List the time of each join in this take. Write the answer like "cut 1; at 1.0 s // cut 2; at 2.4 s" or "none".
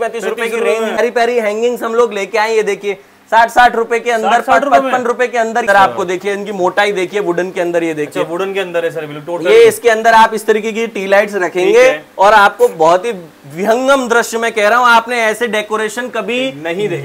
cut 1; at 1.0 s // cut 2; at 5.6 s